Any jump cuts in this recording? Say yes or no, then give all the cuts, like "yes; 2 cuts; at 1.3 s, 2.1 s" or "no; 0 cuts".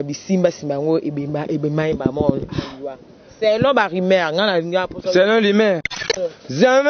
yes; 1 cut; at 5.9 s